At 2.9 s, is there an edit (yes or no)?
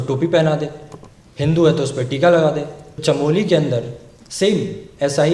yes